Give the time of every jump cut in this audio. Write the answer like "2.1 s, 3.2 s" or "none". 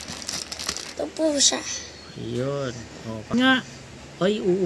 0.8 s, 3.3 s